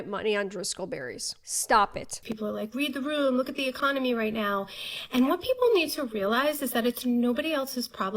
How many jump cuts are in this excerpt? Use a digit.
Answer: 2